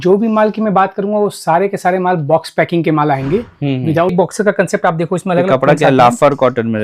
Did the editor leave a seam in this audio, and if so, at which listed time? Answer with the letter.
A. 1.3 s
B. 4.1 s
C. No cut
B